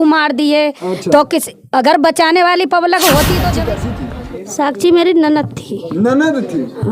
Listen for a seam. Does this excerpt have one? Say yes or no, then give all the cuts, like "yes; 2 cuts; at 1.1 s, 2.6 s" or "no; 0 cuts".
yes; 1 cut; at 3.6 s